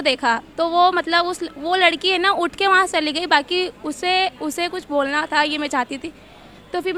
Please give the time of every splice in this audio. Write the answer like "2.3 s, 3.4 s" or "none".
none